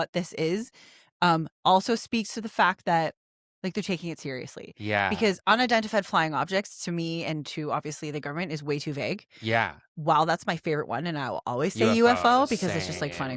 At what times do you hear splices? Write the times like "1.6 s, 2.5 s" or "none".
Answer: none